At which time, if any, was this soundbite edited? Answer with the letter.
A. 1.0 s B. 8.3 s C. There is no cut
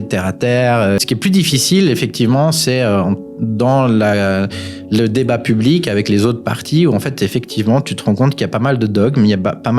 A